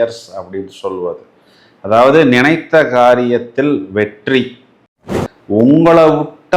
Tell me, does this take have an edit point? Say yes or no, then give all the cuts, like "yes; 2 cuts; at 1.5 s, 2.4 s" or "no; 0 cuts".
yes; 1 cut; at 5.2 s